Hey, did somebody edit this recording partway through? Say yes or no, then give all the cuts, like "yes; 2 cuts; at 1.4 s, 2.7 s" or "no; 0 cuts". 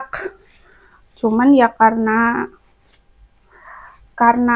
no; 0 cuts